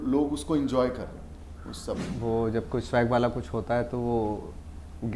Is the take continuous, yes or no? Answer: no